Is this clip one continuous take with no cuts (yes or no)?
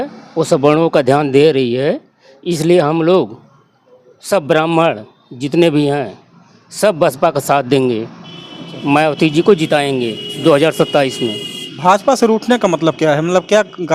yes